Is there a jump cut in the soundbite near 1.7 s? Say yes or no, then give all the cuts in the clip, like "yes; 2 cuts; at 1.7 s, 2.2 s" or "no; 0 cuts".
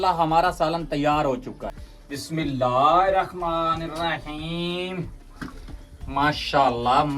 yes; 1 cut; at 1.7 s